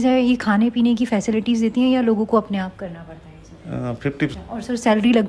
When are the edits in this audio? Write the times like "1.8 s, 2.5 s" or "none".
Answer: 4.3 s